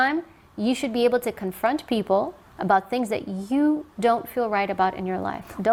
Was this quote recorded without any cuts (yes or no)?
yes